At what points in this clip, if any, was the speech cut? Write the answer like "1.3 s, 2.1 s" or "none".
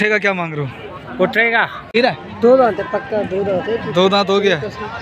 2.0 s